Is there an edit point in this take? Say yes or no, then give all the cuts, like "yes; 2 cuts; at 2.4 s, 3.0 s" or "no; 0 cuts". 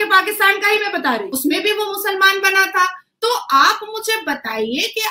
yes; 1 cut; at 1.3 s